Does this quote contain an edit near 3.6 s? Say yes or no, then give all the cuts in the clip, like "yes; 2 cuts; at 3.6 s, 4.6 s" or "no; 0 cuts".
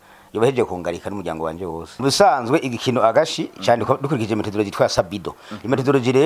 no; 1 cut; at 1.9 s